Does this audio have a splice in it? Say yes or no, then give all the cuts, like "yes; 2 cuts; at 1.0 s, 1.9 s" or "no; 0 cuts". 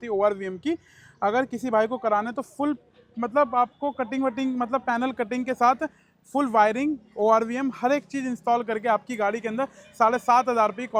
no; 0 cuts